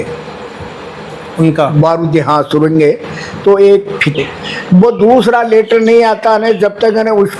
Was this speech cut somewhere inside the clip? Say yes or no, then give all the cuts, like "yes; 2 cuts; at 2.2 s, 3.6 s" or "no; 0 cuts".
yes; 1 cut; at 4.2 s